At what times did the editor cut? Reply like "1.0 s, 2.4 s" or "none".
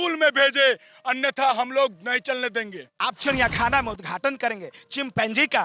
2.8 s